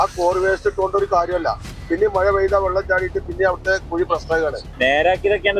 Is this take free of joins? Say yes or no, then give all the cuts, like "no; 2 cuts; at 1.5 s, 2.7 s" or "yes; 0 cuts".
no; 1 cut; at 4.7 s